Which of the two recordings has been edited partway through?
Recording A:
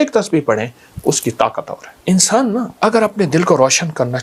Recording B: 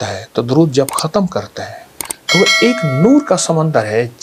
A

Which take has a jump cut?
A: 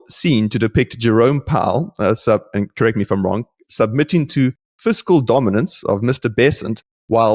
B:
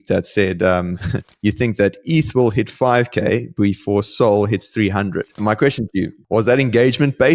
B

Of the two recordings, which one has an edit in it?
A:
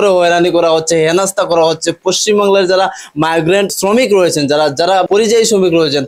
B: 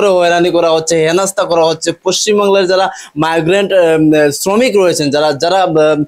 A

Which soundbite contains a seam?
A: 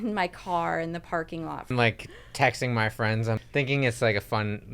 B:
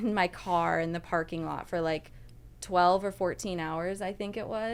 A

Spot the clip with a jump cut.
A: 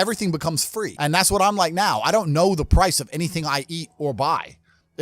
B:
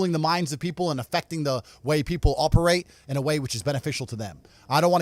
A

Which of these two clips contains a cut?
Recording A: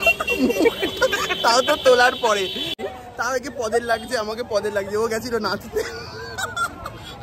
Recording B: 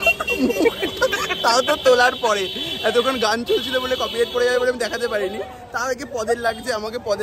A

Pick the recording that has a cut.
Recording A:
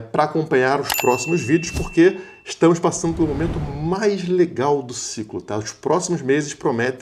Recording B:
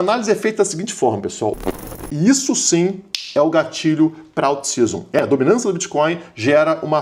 B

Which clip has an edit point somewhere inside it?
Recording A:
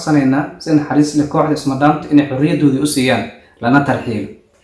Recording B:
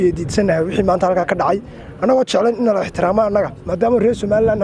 A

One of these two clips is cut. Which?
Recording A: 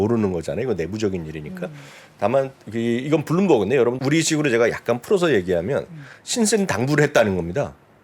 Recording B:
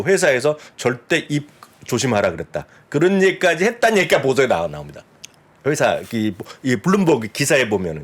A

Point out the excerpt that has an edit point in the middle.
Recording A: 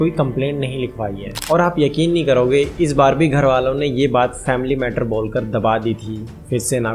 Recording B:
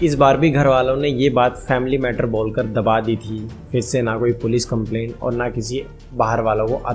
A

